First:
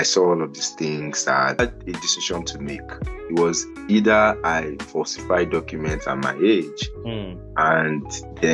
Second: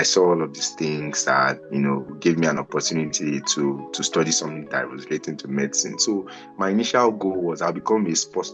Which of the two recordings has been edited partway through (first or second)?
first